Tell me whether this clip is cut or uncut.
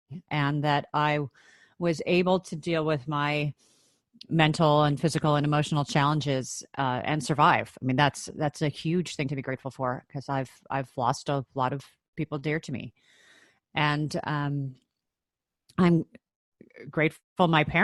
uncut